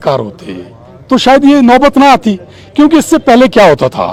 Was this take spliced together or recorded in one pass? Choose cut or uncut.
uncut